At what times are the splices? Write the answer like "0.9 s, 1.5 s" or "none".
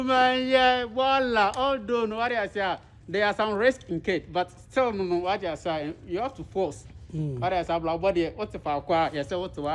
none